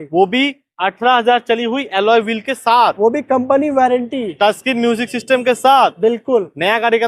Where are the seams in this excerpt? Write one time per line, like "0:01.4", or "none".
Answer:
none